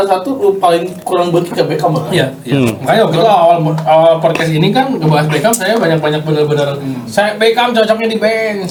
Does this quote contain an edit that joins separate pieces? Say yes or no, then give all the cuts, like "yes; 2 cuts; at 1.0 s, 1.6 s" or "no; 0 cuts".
no; 0 cuts